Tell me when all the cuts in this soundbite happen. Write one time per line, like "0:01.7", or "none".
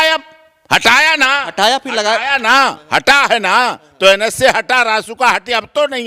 none